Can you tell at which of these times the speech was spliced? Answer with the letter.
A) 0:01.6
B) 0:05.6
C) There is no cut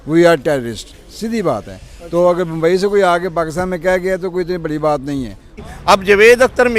B